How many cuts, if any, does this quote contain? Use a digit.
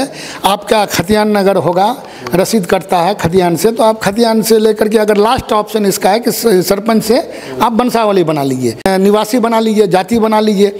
1